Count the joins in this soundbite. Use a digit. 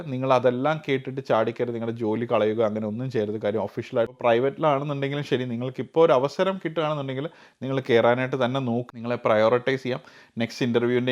2